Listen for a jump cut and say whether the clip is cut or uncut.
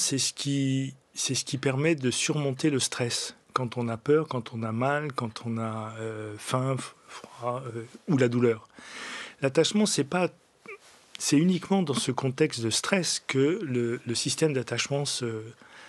uncut